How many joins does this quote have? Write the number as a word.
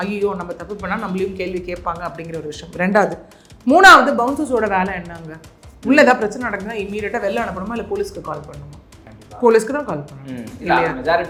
zero